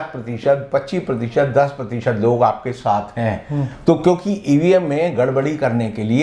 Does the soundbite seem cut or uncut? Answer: uncut